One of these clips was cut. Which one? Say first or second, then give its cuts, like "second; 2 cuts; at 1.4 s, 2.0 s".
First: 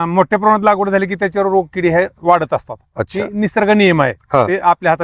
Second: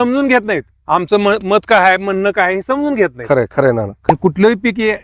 second; 1 cut; at 4.0 s